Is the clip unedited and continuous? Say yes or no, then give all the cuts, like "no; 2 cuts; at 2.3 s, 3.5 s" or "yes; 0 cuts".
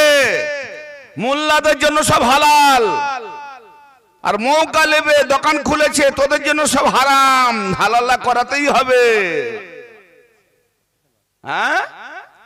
yes; 0 cuts